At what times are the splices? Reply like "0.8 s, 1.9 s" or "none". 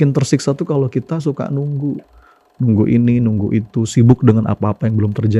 none

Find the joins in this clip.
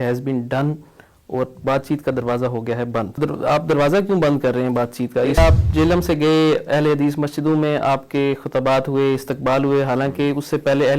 3.2 s, 5.4 s

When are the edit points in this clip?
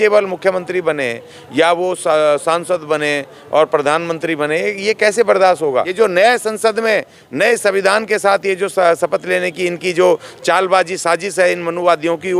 5.9 s

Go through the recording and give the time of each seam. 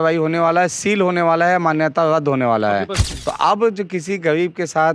3.0 s

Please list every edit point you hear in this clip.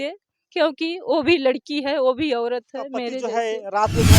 3.3 s

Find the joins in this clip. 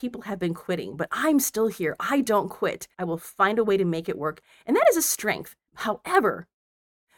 2.9 s, 5.6 s

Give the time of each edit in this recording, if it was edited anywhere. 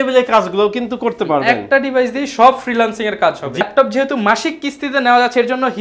3.6 s

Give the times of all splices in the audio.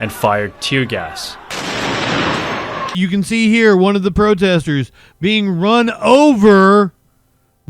2.9 s

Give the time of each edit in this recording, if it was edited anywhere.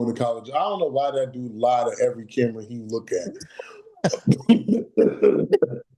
none

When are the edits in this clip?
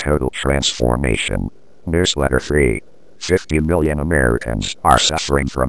1.8 s

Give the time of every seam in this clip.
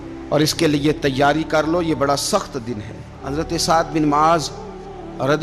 3.2 s

